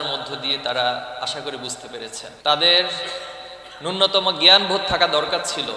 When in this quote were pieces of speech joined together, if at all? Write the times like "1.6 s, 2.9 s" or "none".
2.4 s